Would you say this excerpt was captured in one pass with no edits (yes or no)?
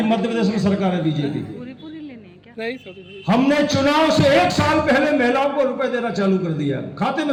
yes